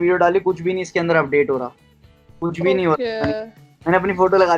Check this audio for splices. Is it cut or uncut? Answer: uncut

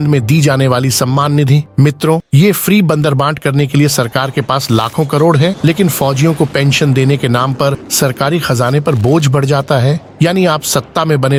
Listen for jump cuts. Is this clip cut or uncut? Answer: uncut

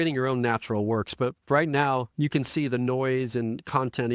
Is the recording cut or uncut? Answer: uncut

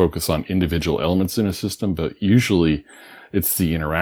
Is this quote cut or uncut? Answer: uncut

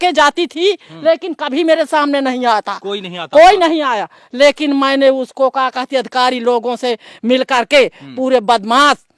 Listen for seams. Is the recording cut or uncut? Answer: uncut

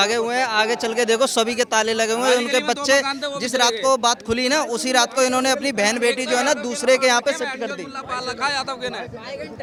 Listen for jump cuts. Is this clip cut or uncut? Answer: uncut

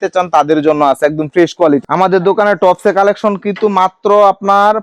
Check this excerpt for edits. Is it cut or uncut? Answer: cut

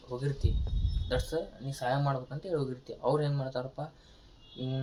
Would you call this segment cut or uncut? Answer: uncut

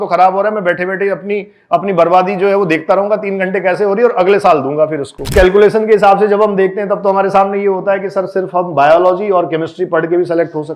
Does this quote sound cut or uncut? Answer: cut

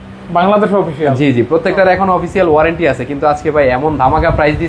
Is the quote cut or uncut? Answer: uncut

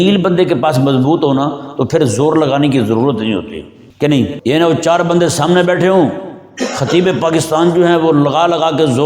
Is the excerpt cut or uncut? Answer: cut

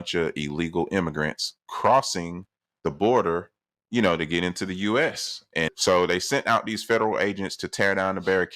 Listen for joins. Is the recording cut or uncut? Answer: cut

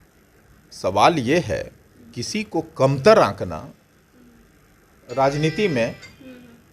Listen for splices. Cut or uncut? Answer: uncut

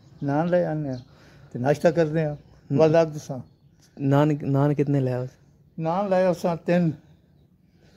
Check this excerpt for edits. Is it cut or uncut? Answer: uncut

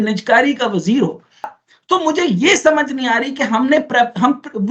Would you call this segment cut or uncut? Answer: uncut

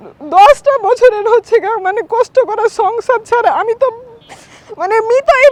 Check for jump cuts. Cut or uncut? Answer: uncut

